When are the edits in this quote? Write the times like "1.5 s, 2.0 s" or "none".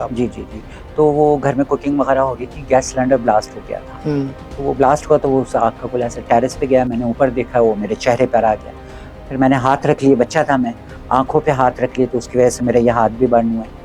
none